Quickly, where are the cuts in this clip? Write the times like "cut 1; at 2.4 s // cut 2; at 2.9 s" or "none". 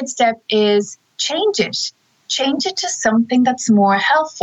none